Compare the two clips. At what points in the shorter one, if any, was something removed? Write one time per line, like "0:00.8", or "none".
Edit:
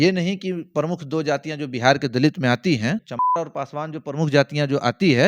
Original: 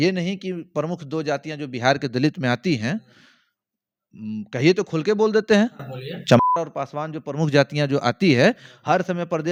0:03.2